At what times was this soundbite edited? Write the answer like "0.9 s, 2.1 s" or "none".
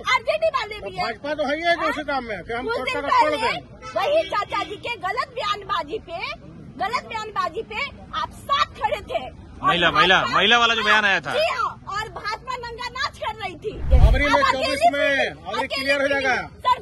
13.9 s